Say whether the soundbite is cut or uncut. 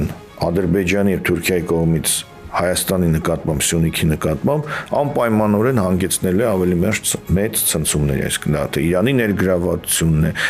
uncut